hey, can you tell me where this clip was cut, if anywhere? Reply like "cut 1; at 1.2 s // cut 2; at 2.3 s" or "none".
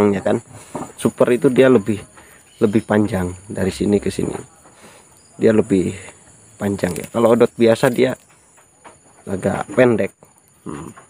cut 1; at 1.1 s